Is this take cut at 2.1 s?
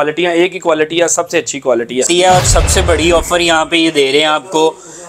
yes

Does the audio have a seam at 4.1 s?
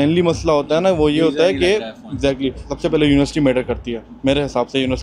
no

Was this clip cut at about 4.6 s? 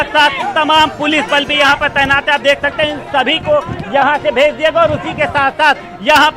yes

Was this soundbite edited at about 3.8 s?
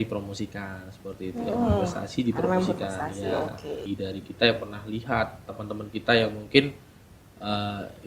yes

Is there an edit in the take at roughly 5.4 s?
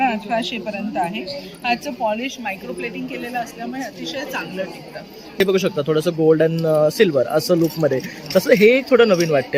yes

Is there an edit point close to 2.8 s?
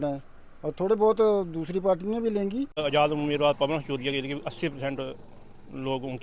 yes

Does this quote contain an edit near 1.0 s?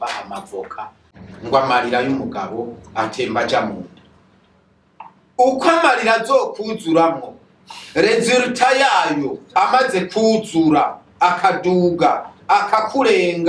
yes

